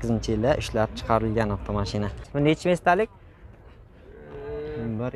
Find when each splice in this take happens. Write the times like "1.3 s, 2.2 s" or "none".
2.2 s